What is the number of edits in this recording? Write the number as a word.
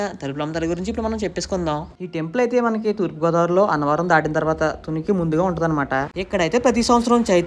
two